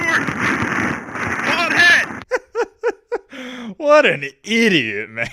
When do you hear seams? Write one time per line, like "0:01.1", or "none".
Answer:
0:02.2